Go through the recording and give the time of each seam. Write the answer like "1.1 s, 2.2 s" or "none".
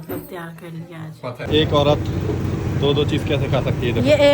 1.5 s